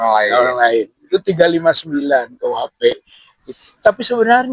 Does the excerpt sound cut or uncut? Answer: cut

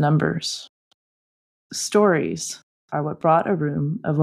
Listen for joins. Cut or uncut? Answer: cut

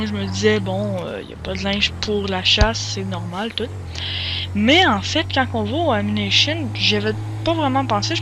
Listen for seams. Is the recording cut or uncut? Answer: cut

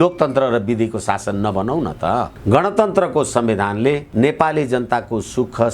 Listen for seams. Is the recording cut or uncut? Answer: cut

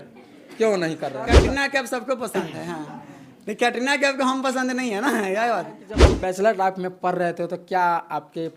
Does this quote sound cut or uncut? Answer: cut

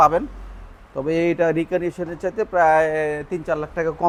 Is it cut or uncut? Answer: uncut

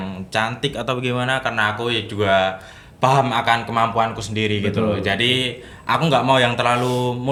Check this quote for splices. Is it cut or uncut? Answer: uncut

